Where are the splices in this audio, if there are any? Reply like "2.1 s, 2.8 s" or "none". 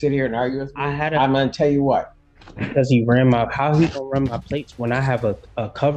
2.2 s